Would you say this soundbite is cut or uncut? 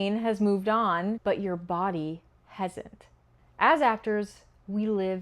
cut